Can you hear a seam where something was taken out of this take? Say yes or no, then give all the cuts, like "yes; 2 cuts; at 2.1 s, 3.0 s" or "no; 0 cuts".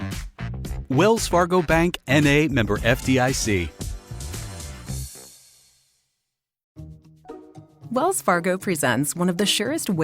yes; 1 cut; at 6.5 s